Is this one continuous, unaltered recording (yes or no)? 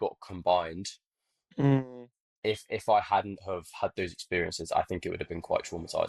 yes